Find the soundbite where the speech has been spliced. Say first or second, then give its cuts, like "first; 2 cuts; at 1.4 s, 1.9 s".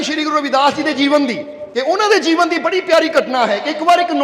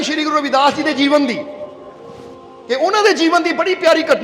first; 1 cut; at 1.5 s